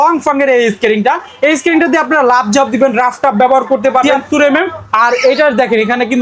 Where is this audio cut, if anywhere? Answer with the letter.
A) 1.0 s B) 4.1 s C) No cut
B